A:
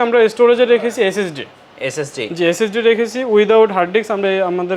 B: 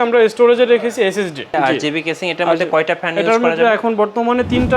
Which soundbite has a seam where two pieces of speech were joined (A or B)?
B